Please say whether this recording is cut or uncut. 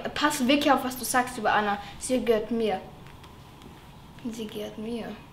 uncut